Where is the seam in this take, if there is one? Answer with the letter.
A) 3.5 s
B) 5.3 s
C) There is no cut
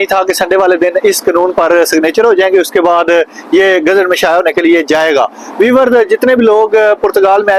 C